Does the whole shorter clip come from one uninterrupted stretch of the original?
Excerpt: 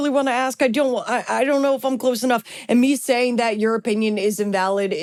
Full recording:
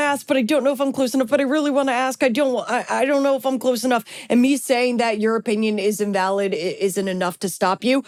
yes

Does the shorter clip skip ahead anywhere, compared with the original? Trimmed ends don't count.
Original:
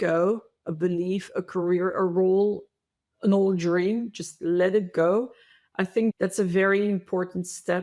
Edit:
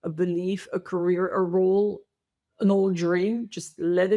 no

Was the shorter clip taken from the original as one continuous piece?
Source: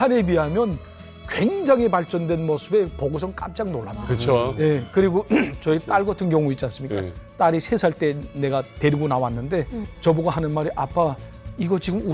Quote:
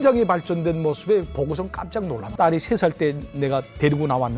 no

